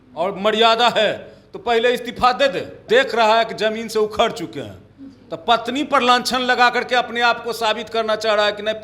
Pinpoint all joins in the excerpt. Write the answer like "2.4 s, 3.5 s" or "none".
2.8 s